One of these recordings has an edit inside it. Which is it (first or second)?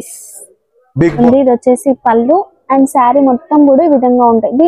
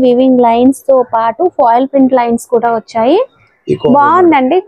first